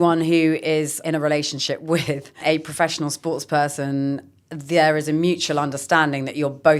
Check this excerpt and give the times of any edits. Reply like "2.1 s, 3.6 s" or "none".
1.0 s